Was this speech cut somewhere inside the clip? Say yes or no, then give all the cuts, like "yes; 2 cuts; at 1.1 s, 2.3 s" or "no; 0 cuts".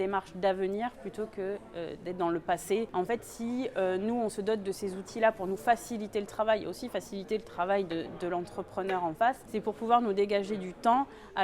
yes; 2 cuts; at 2.9 s, 9.5 s